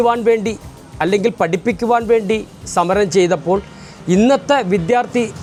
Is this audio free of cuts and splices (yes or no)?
yes